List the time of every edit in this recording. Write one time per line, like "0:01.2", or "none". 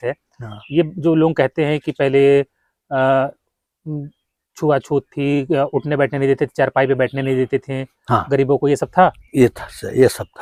none